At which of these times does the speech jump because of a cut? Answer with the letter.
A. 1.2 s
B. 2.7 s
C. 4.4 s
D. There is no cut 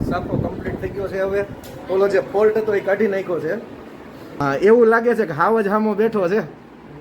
C